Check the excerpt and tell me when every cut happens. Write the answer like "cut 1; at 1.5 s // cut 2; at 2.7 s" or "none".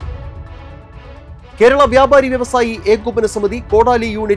cut 1; at 0.8 s // cut 2; at 1.5 s